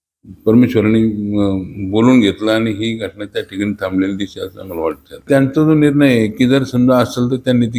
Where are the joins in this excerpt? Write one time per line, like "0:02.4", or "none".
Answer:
0:05.2

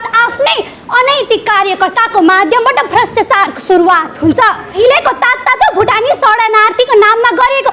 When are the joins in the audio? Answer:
0:04.7

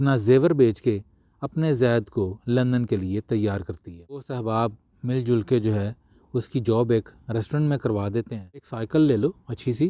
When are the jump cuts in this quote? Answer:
0:04.3
0:08.8

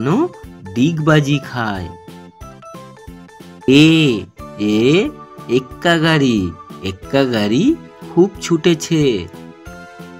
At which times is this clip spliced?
0:09.3

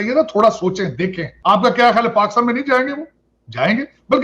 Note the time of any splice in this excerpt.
0:01.3

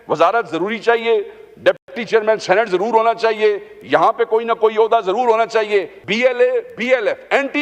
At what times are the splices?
0:06.0

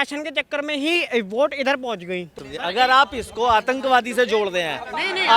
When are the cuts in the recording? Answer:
0:02.4

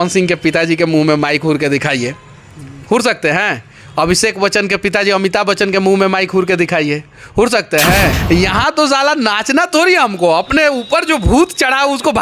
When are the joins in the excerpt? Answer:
0:08.2

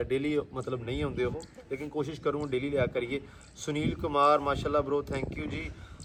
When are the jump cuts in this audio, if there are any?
none

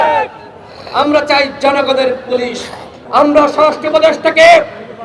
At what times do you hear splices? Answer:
0:03.0

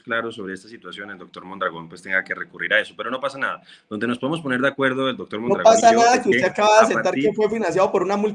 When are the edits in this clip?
none

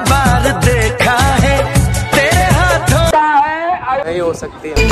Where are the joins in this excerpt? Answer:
0:03.1

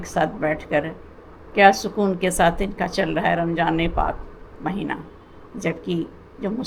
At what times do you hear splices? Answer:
none

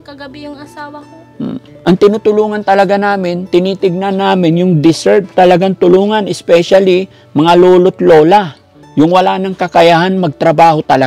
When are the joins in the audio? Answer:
0:01.6

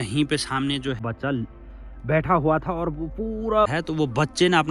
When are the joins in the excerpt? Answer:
0:01.0
0:03.7

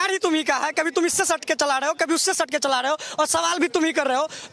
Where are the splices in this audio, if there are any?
none

